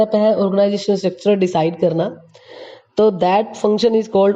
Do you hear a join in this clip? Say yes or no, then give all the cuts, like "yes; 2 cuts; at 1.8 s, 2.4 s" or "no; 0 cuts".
no; 0 cuts